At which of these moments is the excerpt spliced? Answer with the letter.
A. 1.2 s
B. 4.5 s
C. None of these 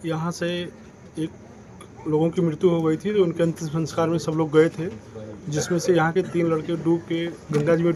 C